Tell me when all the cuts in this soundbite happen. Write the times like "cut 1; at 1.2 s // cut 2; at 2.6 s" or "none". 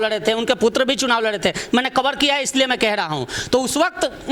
none